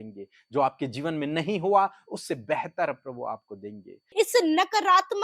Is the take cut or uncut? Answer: cut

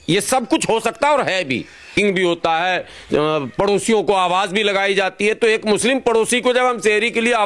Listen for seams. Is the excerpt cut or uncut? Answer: cut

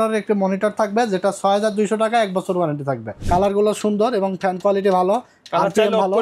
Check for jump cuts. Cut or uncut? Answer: cut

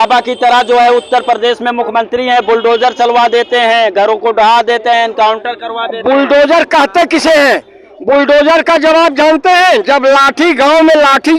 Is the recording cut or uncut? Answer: uncut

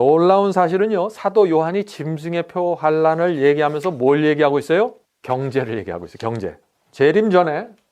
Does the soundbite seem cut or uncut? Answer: cut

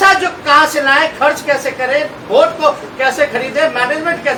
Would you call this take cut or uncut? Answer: uncut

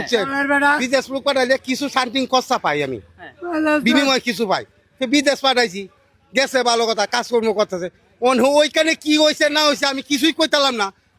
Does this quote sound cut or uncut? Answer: uncut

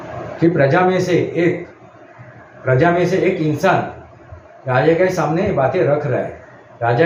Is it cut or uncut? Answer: uncut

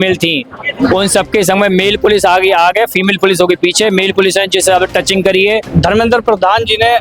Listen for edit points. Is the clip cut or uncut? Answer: cut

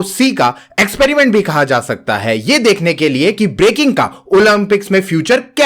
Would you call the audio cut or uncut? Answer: uncut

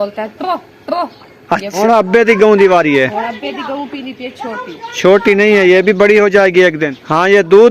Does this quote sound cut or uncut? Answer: cut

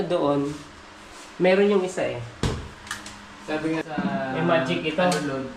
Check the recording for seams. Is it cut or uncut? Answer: cut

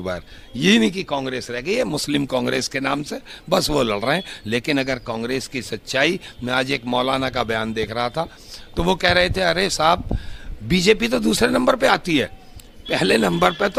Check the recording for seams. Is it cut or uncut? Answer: uncut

